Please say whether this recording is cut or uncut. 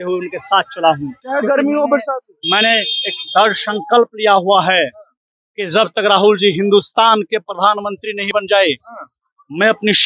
cut